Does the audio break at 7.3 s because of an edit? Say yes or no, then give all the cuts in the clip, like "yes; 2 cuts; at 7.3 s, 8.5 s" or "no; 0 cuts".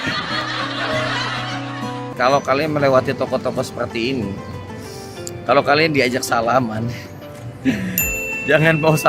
no; 1 cut; at 2.0 s